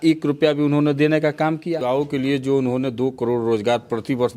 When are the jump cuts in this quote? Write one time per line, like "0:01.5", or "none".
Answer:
0:01.8